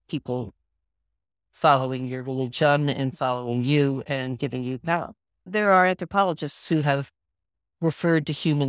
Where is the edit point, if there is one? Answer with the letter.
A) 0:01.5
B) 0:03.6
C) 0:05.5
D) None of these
C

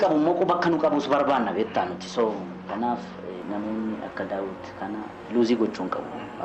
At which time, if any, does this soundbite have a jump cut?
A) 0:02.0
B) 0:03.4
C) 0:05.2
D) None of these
B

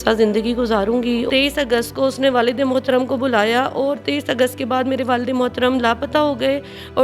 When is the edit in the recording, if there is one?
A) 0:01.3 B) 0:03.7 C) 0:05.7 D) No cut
A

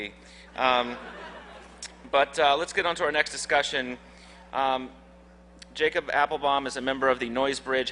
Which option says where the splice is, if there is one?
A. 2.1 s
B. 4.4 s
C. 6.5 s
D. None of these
B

